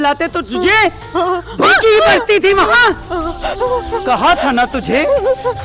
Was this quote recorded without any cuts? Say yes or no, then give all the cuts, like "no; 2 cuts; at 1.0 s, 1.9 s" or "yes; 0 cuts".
no; 1 cut; at 3.4 s